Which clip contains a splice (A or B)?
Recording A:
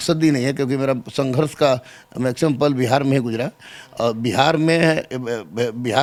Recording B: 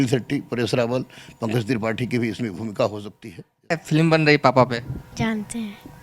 B